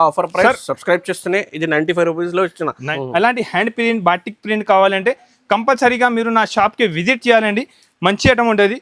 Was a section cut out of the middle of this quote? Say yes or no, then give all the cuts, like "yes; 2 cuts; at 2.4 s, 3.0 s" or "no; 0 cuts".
yes; 1 cut; at 2.8 s